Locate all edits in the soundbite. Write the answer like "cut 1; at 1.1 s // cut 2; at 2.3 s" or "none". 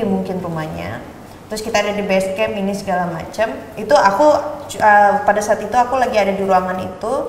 none